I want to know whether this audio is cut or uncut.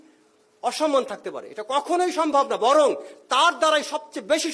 uncut